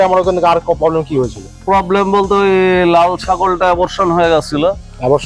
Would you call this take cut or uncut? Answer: cut